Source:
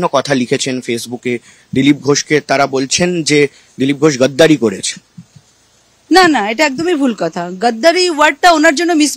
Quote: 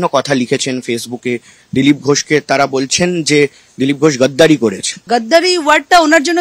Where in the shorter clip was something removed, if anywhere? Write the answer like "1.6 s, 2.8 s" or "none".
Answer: 4.9 s